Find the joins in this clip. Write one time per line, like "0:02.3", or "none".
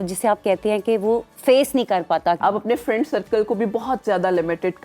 0:02.4